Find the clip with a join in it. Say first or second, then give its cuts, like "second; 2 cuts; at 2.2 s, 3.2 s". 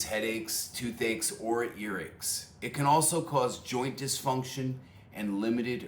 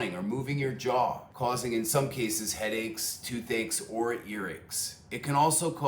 second; 1 cut; at 1.3 s